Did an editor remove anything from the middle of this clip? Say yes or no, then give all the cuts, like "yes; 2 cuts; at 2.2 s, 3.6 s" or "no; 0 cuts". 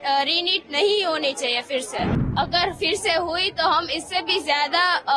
yes; 1 cut; at 2.3 s